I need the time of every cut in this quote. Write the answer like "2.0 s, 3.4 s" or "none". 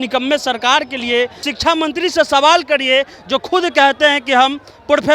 1.4 s